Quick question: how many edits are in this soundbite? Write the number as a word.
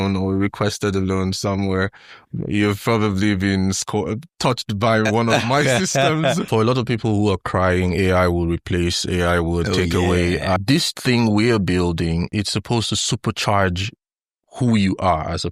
three